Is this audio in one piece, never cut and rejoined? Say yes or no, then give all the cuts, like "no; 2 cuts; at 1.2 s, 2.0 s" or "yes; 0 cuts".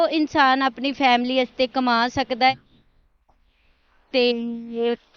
no; 1 cut; at 2.5 s